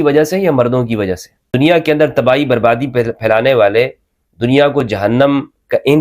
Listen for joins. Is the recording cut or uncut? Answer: cut